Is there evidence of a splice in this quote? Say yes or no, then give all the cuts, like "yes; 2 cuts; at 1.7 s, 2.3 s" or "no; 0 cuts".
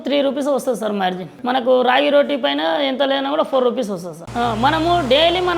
yes; 1 cut; at 4.2 s